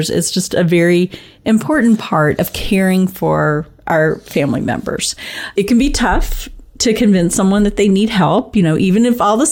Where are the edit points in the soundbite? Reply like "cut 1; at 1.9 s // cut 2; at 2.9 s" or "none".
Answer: none